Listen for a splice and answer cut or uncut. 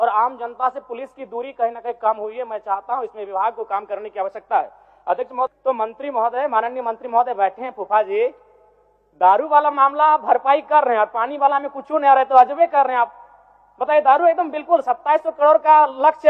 cut